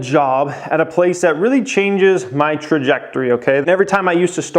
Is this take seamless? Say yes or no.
no